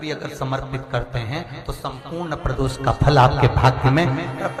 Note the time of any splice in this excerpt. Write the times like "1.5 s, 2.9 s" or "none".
none